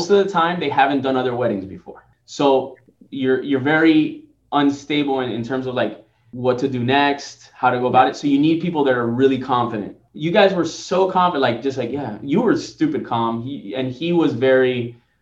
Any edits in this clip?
no; 0 cuts

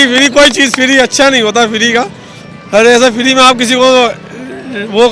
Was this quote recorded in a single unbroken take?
yes; 0 cuts

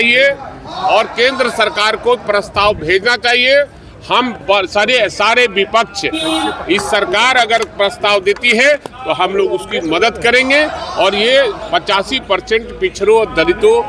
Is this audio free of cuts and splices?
yes; 0 cuts

